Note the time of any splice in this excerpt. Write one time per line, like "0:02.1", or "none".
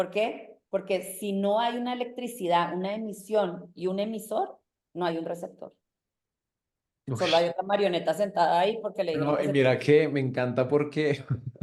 none